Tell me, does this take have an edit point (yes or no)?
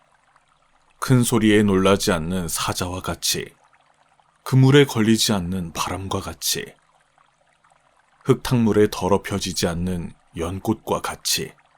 yes